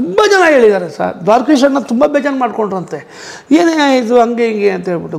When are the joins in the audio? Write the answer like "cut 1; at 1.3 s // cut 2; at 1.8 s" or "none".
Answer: none